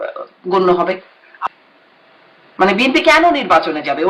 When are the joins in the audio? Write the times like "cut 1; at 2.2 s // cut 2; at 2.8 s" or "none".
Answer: cut 1; at 1.5 s